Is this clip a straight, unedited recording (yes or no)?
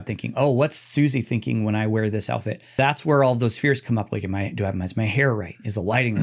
no